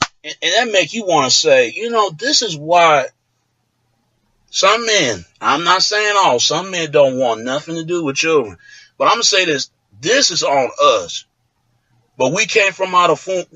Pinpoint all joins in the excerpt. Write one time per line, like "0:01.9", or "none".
0:10.3